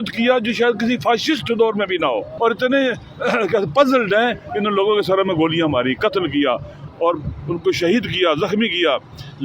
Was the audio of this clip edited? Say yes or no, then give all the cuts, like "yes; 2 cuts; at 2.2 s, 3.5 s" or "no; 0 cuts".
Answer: yes; 1 cut; at 2.3 s